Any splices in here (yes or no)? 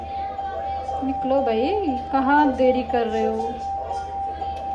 no